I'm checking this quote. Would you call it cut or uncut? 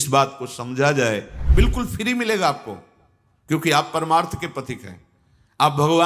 cut